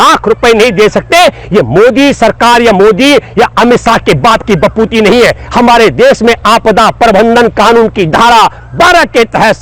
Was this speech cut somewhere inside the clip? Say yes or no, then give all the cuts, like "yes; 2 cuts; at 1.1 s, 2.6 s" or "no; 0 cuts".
no; 0 cuts